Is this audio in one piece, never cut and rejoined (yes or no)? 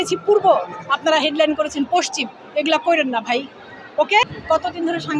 yes